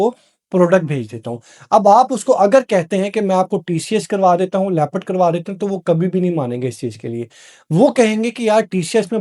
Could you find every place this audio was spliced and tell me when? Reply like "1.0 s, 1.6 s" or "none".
none